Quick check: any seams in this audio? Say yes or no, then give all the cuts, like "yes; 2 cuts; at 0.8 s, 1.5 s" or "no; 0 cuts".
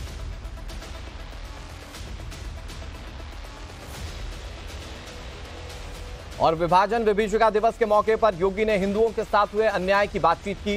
no; 0 cuts